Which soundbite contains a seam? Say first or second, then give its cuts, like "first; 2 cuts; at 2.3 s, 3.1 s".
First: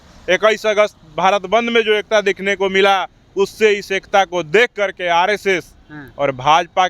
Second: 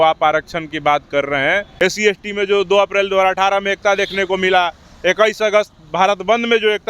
second; 1 cut; at 1.7 s